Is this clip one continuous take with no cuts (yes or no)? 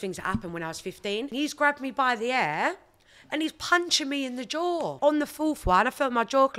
no